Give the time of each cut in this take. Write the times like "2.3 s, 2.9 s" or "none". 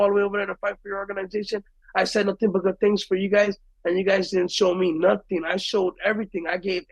none